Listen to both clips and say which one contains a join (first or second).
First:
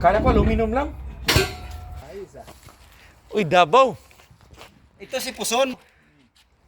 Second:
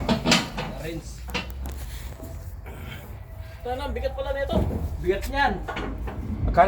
first